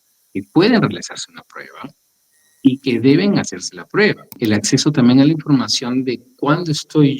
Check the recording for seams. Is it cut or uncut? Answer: cut